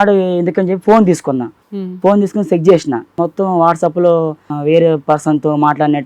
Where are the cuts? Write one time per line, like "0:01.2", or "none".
0:01.6
0:03.2
0:04.5

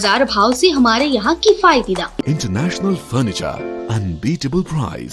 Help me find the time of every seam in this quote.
0:02.2

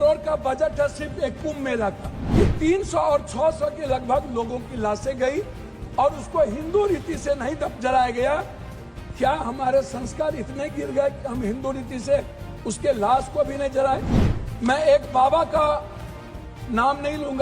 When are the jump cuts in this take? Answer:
0:02.1
0:14.1

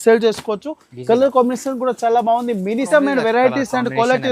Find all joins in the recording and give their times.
0:02.9

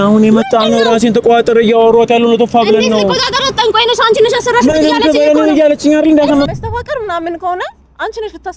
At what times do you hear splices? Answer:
0:06.5

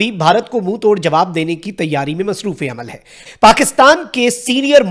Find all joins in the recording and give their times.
0:03.2

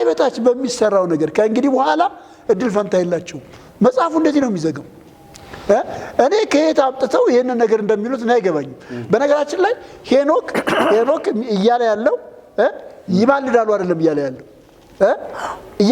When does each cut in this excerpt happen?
none

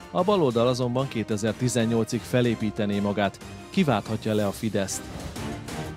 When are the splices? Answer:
0:05.0

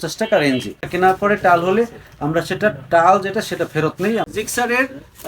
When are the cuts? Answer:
0:00.9
0:04.2

